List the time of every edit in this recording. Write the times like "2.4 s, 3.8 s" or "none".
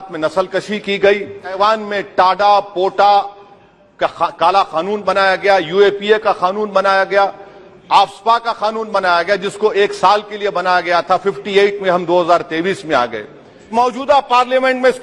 1.6 s, 13.7 s